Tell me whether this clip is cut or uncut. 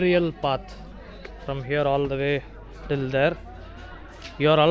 uncut